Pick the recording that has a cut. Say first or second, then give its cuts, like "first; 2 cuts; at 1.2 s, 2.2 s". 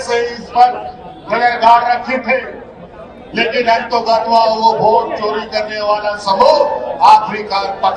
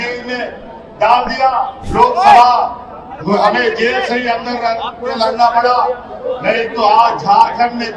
second; 1 cut; at 1.8 s